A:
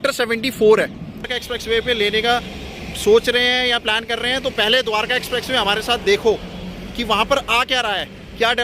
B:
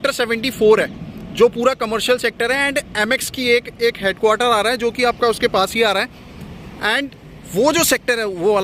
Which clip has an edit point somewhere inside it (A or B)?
A